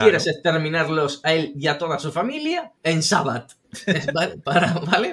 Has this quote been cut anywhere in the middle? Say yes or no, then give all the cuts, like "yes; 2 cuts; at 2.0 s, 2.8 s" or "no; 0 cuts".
no; 0 cuts